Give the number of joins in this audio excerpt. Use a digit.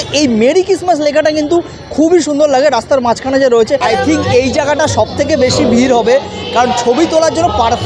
1